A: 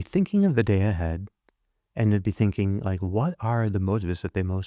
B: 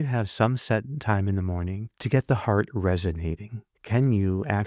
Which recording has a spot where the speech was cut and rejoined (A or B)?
B